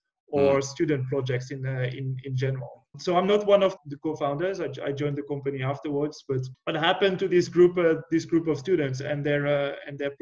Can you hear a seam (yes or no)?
yes